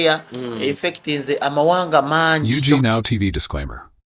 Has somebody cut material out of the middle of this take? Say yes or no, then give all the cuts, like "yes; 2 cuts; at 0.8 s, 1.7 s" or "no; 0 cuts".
yes; 1 cut; at 2.4 s